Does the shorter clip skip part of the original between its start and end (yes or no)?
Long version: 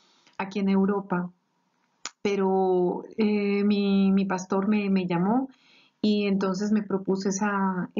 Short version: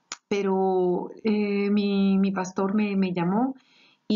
no